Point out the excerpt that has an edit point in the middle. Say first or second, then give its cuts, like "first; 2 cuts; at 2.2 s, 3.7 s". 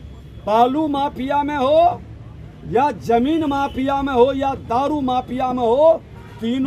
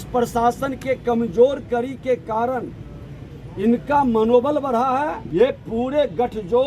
second; 1 cut; at 5.2 s